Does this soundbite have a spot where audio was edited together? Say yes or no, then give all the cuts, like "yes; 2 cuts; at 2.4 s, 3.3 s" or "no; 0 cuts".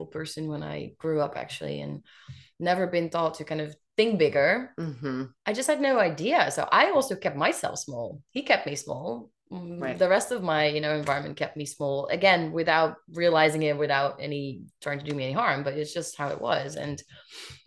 no; 0 cuts